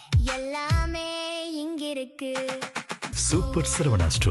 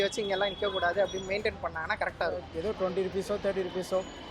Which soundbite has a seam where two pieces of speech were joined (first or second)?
second